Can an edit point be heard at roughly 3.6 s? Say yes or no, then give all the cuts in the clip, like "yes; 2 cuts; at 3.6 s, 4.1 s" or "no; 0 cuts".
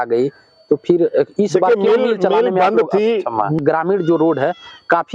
yes; 1 cut; at 3.6 s